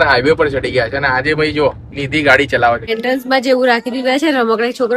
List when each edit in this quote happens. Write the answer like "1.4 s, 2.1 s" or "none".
2.9 s